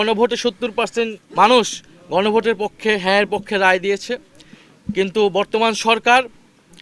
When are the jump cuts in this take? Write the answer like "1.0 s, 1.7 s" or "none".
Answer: 1.2 s

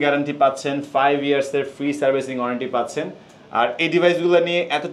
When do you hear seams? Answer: none

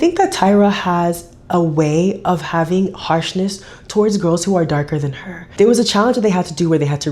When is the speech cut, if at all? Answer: none

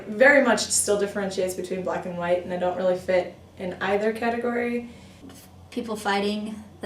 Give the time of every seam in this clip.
5.0 s

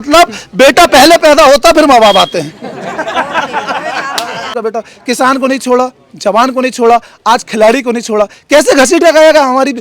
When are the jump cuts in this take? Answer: 4.5 s

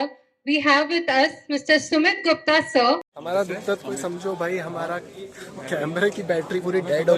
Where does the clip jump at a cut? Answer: 3.1 s

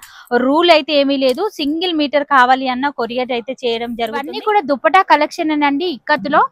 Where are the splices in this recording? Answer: 4.3 s

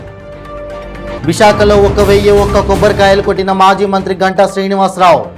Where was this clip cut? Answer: 1.2 s

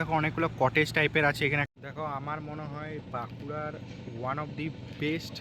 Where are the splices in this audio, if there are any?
1.7 s

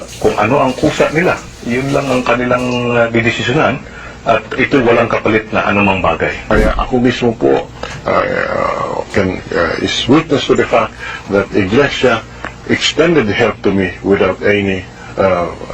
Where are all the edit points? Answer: none

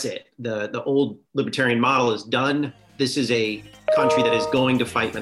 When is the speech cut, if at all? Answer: 1.2 s, 2.8 s

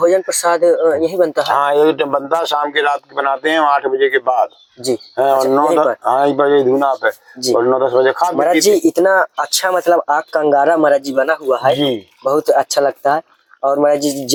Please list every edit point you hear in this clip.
none

